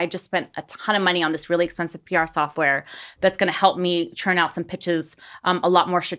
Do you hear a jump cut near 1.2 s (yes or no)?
no